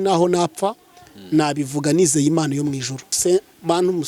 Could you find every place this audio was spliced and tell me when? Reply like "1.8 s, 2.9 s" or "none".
3.1 s